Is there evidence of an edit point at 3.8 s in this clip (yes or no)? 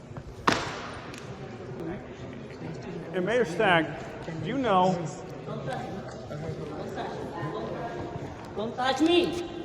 no